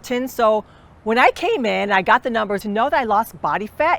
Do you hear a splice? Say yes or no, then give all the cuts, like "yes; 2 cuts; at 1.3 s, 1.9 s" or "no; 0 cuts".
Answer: yes; 1 cut; at 2.6 s